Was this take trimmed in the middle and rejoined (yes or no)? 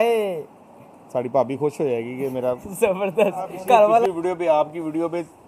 yes